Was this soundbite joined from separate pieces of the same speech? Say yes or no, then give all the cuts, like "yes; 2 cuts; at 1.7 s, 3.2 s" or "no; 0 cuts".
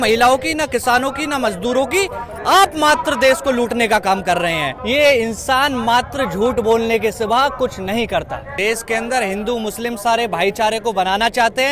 yes; 2 cuts; at 4.7 s, 8.5 s